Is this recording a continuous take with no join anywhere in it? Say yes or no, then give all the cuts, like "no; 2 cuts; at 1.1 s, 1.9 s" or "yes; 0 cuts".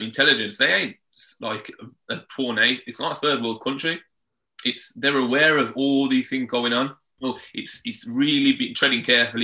no; 1 cut; at 7.0 s